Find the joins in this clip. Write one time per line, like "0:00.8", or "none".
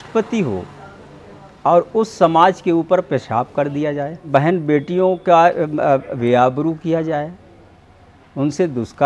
0:04.3